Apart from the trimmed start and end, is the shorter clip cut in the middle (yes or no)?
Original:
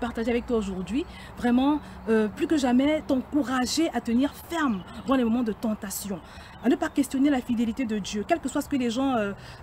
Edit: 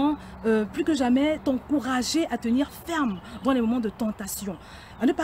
no